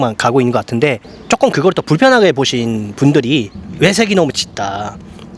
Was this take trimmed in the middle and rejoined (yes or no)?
yes